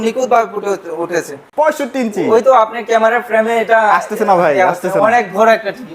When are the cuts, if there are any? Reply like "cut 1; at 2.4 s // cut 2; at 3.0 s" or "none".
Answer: cut 1; at 1.4 s